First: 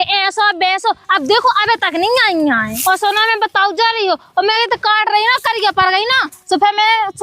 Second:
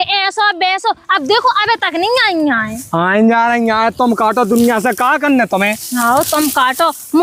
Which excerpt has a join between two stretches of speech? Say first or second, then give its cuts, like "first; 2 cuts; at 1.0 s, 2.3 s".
first; 1 cut; at 2.7 s